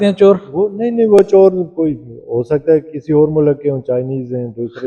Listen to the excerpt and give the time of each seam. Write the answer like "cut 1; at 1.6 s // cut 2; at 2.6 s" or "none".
none